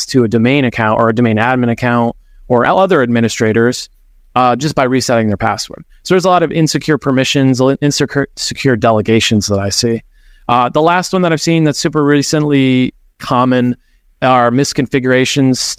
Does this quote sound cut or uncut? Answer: uncut